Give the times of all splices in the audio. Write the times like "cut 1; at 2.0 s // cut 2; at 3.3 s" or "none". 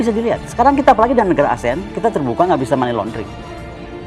cut 1; at 3.2 s